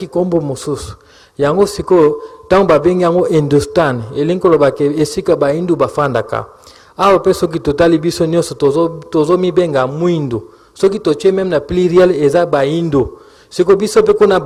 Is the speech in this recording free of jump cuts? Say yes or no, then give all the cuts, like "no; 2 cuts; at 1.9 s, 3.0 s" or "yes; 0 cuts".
yes; 0 cuts